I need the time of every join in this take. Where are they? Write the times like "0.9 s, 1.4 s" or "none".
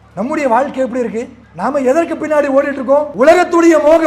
1.4 s, 3.1 s